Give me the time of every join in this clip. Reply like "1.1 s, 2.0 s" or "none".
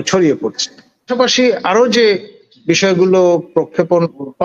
1.1 s